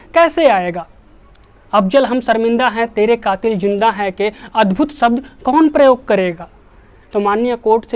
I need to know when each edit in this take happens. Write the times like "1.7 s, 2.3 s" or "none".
6.9 s